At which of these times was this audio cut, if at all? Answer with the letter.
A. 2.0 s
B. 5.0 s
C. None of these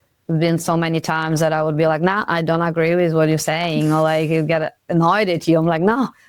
C